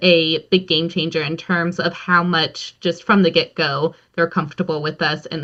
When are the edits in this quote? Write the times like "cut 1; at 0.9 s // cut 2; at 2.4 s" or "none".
none